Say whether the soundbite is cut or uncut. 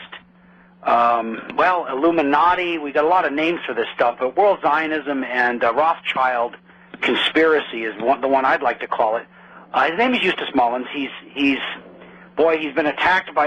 uncut